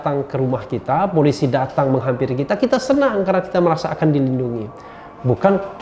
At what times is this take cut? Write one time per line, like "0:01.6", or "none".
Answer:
none